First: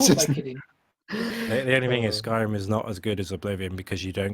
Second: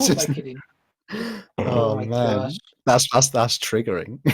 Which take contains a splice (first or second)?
first